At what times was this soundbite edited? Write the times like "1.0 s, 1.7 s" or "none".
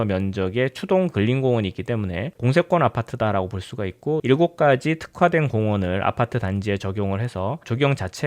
4.2 s